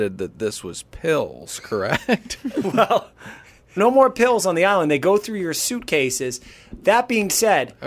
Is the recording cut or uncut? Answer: cut